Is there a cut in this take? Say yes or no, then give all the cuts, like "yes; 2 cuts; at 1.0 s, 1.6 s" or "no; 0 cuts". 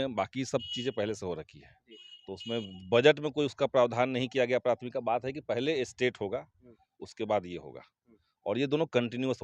no; 0 cuts